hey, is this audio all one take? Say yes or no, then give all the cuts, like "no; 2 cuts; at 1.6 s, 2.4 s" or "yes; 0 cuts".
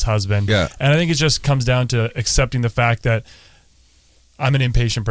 yes; 0 cuts